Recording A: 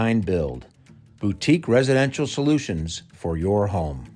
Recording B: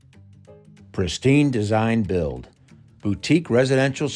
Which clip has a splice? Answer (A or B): B